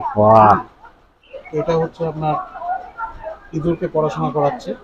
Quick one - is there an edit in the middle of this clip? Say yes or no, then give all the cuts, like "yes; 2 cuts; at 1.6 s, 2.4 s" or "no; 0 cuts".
no; 0 cuts